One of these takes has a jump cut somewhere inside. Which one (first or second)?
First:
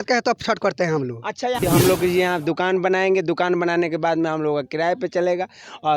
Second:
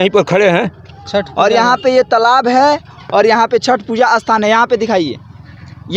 first